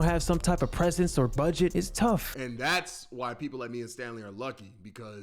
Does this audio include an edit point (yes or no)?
yes